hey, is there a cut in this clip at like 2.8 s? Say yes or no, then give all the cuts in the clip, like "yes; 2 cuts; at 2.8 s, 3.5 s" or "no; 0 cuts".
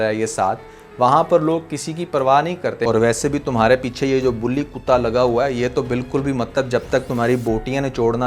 yes; 1 cut; at 2.8 s